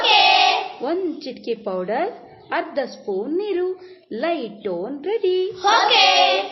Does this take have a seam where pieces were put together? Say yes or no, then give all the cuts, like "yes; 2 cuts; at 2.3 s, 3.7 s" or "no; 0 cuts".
no; 0 cuts